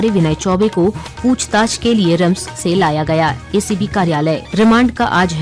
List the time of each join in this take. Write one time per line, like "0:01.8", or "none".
0:04.4